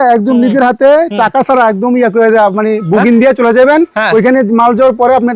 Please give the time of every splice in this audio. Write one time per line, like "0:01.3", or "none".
none